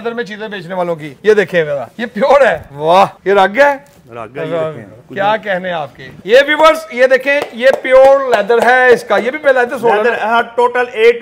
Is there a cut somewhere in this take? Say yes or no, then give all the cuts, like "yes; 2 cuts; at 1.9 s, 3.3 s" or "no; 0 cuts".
yes; 1 cut; at 6.1 s